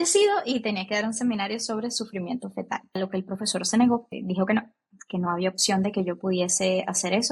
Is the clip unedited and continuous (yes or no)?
no